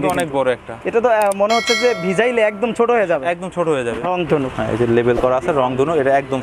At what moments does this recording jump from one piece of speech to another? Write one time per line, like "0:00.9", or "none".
0:04.1